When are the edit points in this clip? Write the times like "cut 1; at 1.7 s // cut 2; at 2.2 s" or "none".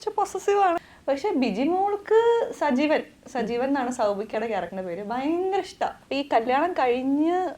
cut 1; at 0.9 s // cut 2; at 6.0 s